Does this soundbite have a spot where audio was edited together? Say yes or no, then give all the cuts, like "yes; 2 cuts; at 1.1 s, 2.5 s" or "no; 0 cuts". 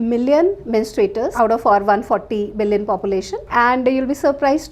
yes; 2 cuts; at 1.3 s, 3.4 s